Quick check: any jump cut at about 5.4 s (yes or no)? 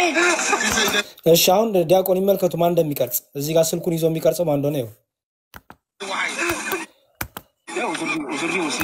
no